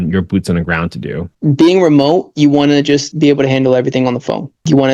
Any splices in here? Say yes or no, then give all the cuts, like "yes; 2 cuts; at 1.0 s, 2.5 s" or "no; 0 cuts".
yes; 2 cuts; at 1.3 s, 3.1 s